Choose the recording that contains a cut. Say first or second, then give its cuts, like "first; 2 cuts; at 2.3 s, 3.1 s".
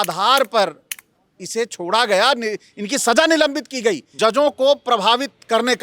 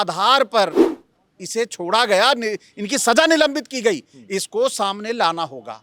first; 1 cut; at 4.1 s